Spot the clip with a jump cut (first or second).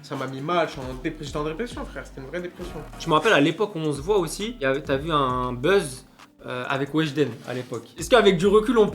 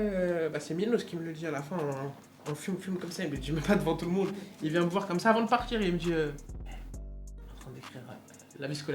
first